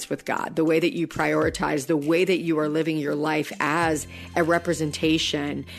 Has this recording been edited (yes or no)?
no